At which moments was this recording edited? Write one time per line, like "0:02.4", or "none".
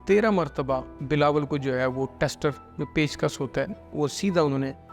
0:00.9
0:03.9